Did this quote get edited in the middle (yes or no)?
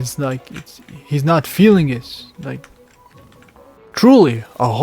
yes